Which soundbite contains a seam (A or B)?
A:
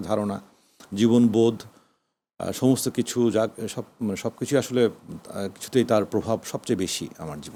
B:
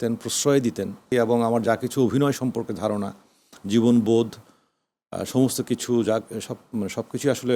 B